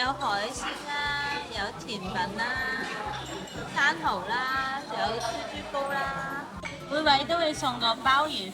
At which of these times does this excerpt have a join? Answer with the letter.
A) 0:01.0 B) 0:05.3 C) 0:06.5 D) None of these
C